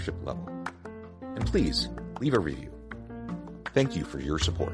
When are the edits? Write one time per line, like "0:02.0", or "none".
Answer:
none